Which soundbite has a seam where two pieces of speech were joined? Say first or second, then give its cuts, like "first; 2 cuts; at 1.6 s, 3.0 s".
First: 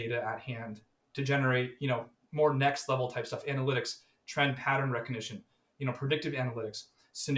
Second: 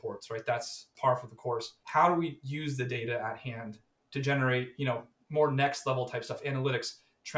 second; 2 cuts; at 0.9 s, 1.8 s